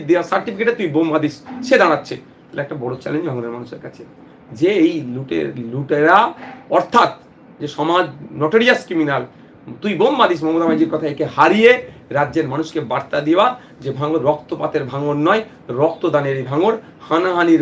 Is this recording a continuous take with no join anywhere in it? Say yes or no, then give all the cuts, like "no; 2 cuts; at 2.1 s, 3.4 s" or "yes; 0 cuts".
yes; 0 cuts